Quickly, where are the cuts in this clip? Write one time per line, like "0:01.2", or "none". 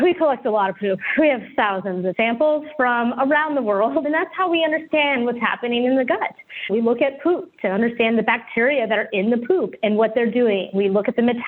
0:02.1
0:04.0